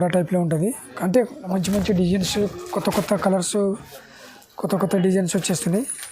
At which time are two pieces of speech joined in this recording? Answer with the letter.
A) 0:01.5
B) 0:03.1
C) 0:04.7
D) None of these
A